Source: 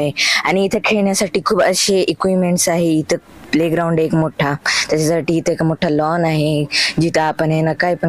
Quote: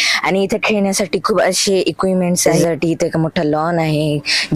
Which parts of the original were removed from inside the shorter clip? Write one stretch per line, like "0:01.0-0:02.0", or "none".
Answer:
0:02.7-0:04.9